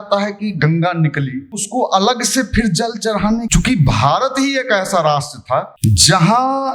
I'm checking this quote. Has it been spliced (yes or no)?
yes